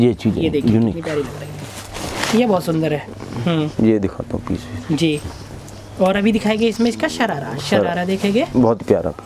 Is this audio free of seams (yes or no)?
yes